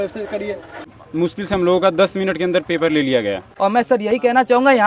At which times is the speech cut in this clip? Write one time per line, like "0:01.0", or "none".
0:00.9
0:03.4